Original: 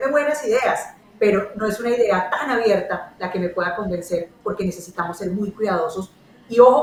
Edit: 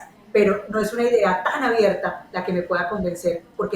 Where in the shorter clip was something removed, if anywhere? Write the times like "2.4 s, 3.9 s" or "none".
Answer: none